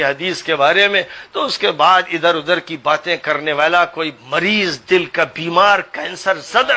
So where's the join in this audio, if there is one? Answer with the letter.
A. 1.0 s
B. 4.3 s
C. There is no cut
C